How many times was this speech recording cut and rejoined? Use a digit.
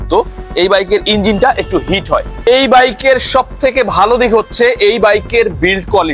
1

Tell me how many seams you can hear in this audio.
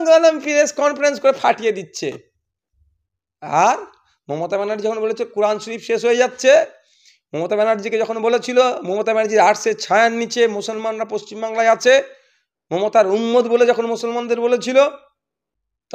0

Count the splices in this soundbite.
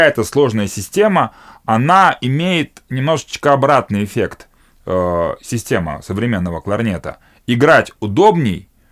0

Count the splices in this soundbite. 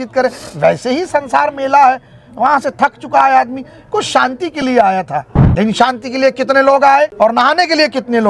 2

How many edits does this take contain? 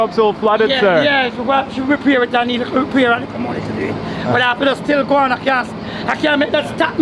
0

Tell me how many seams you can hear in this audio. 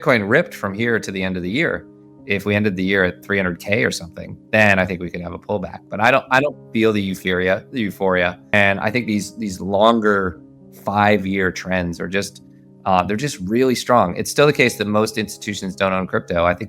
1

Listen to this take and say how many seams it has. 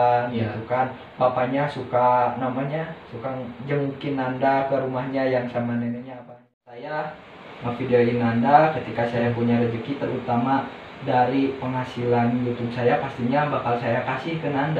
1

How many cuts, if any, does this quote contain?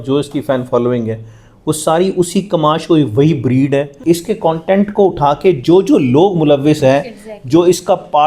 1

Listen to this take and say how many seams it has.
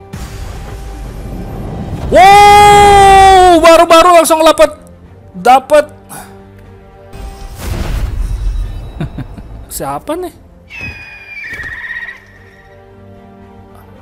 1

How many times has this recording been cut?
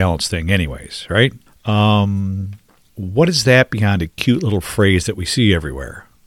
1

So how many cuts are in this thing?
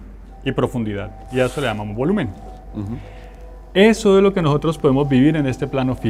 0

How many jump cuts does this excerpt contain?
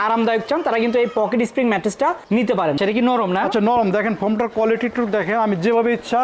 1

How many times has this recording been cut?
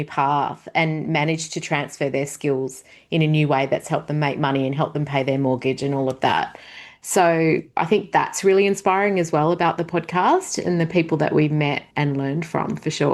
1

